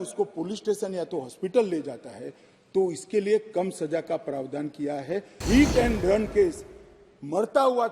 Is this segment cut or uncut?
cut